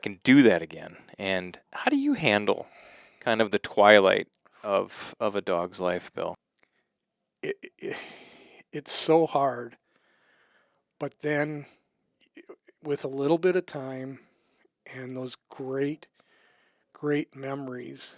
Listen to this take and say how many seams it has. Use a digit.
1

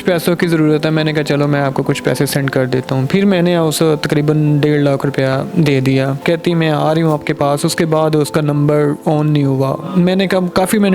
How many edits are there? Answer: 1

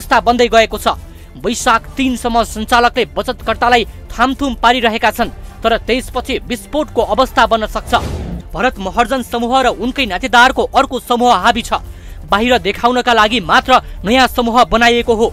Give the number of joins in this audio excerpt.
1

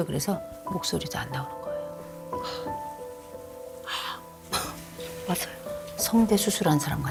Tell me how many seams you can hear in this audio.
0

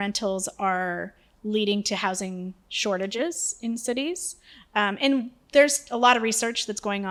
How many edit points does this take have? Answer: 0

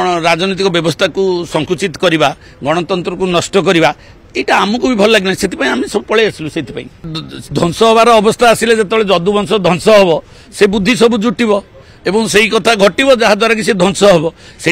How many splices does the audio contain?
1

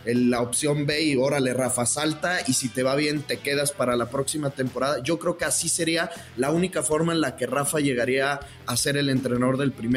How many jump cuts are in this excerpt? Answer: 0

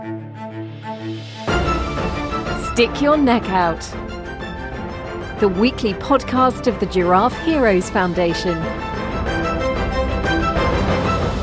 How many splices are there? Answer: 0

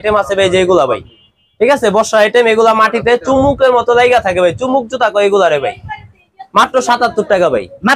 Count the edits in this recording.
0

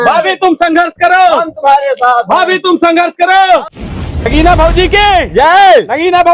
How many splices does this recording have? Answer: 1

